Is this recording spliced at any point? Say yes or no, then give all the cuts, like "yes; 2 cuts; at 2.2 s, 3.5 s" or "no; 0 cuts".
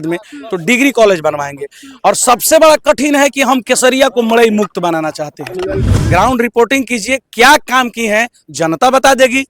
yes; 1 cut; at 5.9 s